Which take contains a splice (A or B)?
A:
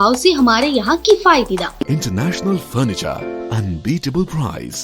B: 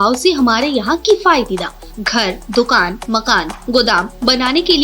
A